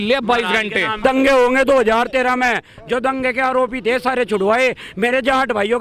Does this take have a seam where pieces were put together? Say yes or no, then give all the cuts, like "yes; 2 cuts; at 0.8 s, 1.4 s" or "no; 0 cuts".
yes; 1 cut; at 1.0 s